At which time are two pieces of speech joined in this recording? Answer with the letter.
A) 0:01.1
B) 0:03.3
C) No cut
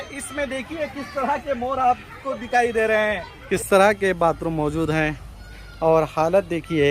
B